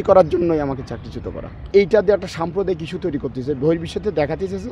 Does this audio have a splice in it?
yes; 1 cut; at 1.7 s

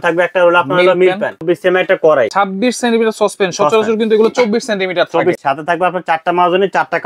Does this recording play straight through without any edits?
no; 3 cuts; at 1.4 s, 2.3 s, 5.4 s

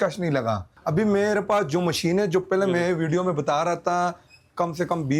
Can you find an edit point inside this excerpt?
no; 0 cuts

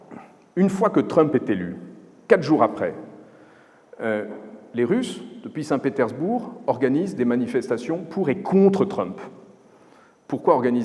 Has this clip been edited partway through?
no; 0 cuts

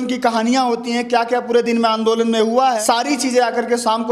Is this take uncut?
no; 1 cut; at 2.8 s

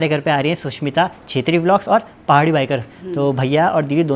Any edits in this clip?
no; 0 cuts

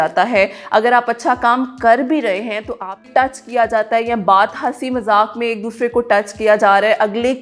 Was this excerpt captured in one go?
no; 1 cut; at 3.0 s

